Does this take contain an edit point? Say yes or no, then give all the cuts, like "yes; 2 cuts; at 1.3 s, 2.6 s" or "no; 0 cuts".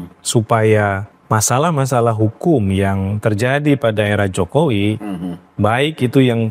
yes; 1 cut; at 1.1 s